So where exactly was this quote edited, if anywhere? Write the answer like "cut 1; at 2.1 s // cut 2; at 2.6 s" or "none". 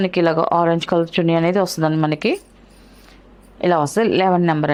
none